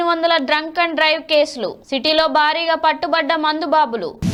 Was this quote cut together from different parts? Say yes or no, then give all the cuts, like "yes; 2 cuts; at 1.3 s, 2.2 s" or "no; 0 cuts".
no; 0 cuts